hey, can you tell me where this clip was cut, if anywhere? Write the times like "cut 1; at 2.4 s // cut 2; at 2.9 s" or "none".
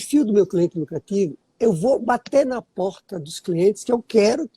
cut 1; at 1.4 s